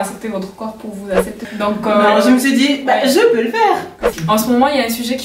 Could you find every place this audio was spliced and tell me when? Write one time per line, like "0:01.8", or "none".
0:01.5
0:04.0